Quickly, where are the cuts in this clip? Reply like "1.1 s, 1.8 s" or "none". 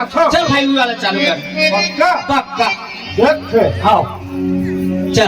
none